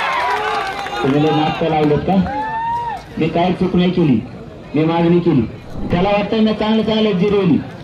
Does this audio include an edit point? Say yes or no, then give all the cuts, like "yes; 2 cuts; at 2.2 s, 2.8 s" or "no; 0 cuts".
yes; 1 cut; at 5.9 s